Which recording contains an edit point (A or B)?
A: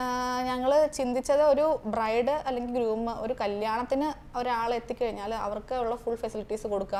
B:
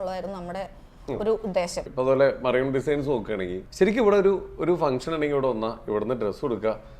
B